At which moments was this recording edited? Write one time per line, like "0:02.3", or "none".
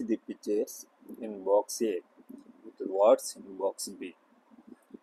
0:02.9